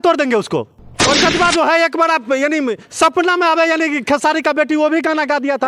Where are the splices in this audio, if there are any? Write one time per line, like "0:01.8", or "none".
0:00.9